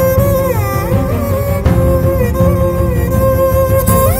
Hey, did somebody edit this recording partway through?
no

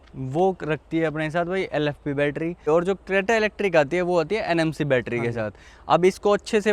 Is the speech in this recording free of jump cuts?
yes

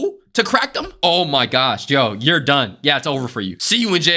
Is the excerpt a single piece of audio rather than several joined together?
no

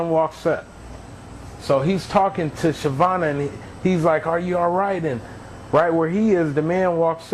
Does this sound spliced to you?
no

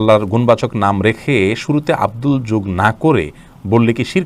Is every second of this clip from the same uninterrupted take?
yes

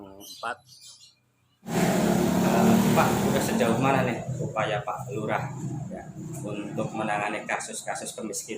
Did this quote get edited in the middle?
yes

